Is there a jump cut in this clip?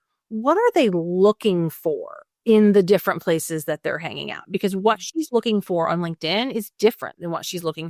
no; 0 cuts

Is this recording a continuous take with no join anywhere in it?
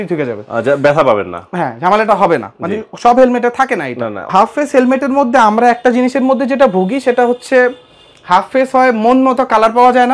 no; 1 cut; at 4.3 s

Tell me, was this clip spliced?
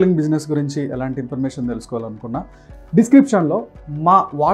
no; 0 cuts

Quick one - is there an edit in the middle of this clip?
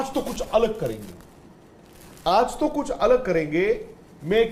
no; 0 cuts

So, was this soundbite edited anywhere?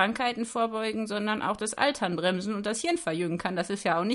no; 0 cuts

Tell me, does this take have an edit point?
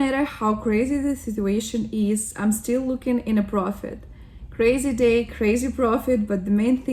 no; 0 cuts

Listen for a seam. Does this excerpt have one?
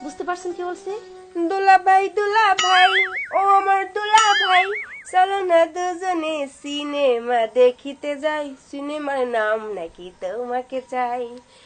yes; 1 cut; at 1.1 s

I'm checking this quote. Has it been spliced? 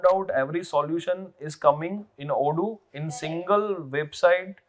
no; 0 cuts

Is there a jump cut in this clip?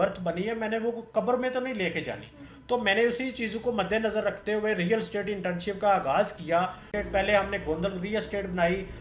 yes; 1 cut; at 6.9 s

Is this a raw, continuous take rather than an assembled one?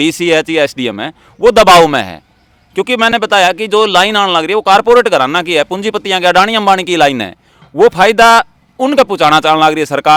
yes; 0 cuts

